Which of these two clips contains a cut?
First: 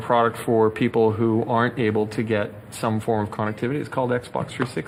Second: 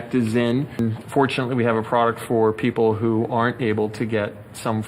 second; 1 cut; at 0.9 s

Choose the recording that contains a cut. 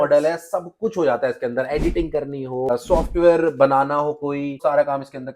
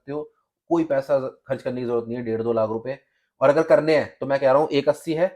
first; 2 cuts; at 2.7 s, 4.6 s

